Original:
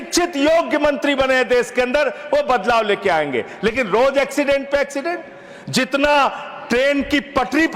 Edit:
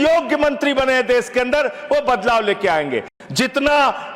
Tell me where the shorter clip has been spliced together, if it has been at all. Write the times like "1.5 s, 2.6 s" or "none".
3.1 s